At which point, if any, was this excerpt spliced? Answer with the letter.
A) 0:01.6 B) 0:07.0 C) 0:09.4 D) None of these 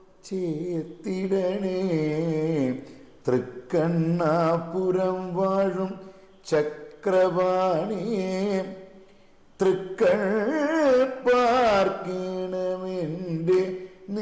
D